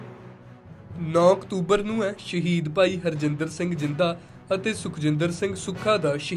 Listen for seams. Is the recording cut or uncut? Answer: cut